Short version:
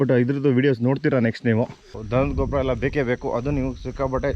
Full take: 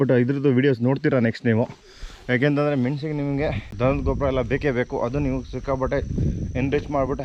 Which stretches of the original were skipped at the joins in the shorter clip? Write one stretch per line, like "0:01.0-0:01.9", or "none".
0:02.0-0:03.6

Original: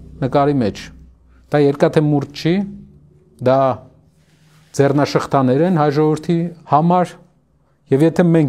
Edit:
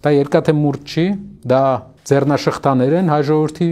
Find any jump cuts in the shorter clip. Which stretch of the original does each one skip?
0:02.8-0:03.3
0:03.9-0:04.6

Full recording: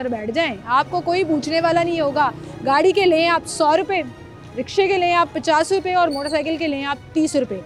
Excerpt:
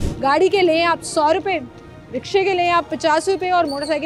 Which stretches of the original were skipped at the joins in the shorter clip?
none

